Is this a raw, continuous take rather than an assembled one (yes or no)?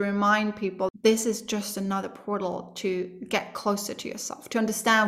no